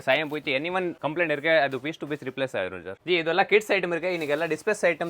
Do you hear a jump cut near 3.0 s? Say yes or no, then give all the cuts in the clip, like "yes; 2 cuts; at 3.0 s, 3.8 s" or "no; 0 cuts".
yes; 2 cuts; at 1.0 s, 3.0 s